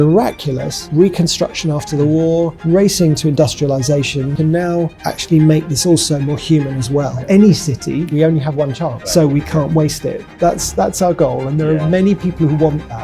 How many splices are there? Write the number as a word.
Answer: five